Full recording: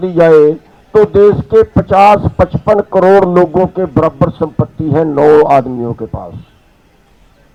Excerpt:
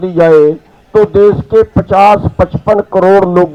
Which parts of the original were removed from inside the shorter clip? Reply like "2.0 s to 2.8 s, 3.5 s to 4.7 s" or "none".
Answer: none